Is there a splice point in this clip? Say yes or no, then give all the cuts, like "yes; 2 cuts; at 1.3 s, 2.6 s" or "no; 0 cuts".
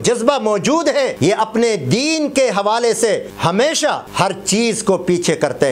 yes; 3 cuts; at 1.1 s, 3.3 s, 4.1 s